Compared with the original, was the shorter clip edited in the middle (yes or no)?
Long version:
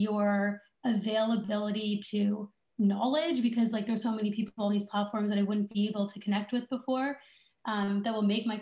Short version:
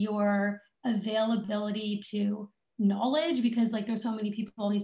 no